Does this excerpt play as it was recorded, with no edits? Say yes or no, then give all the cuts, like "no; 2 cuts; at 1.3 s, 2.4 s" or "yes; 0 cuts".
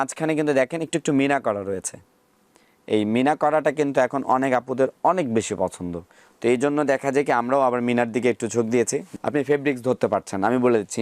no; 1 cut; at 9.1 s